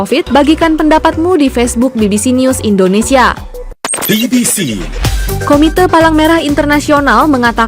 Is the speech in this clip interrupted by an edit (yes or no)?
yes